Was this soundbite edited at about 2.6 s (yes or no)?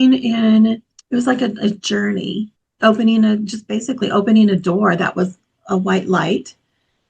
yes